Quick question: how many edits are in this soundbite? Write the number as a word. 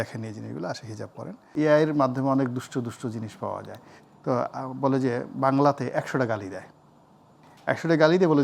one